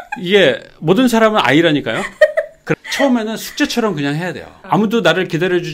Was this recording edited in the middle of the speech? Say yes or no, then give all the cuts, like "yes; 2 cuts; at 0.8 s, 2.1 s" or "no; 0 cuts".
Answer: yes; 2 cuts; at 2.7 s, 4.5 s